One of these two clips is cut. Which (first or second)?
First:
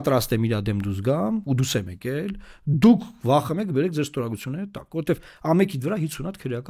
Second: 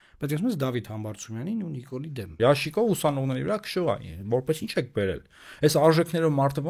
second